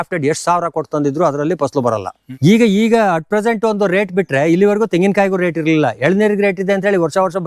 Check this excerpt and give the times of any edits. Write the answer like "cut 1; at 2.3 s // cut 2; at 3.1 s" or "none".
cut 1; at 2.1 s